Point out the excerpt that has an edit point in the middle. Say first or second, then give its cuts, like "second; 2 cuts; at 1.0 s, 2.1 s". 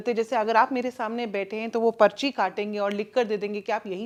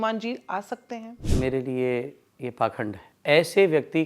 second; 2 cuts; at 1.2 s, 3.1 s